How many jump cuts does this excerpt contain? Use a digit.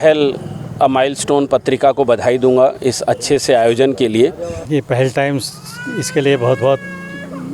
1